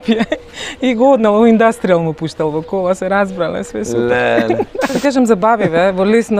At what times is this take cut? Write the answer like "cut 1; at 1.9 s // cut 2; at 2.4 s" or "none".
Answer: cut 1; at 5.0 s